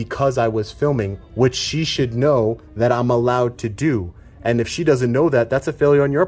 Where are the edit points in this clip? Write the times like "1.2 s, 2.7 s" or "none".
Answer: none